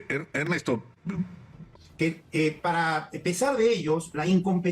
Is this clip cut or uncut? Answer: cut